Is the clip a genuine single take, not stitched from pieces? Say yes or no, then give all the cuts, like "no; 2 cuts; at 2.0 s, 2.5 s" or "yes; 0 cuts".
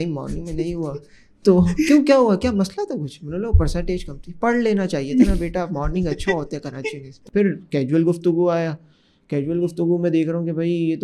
no; 1 cut; at 7.3 s